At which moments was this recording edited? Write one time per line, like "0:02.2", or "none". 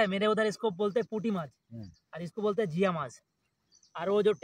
none